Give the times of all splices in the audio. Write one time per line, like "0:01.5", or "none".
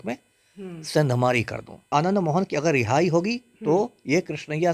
0:01.9

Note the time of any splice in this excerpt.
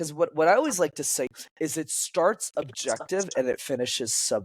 0:01.3

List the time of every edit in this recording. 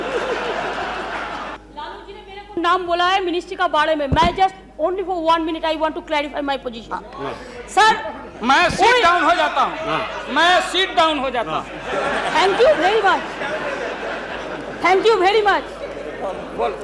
0:01.6

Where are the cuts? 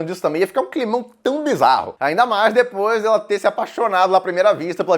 0:01.9

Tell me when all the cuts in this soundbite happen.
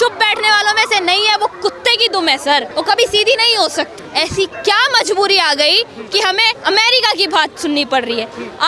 0:02.7
0:04.0
0:06.6

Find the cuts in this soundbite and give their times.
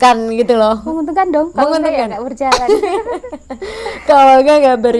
none

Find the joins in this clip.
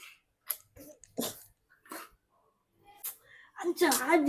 0:03.0

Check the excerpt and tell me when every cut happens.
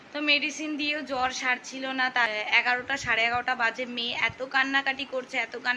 0:02.3

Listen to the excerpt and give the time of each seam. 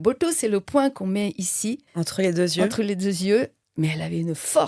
0:01.9
0:03.6

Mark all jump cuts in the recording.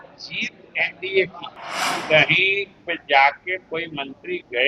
0:02.0

